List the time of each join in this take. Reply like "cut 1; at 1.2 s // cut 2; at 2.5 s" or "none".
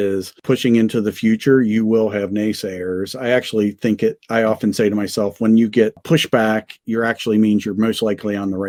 none